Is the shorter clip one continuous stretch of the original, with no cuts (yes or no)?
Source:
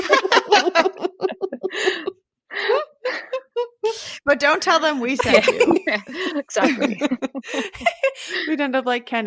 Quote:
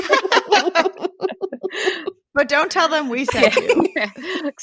no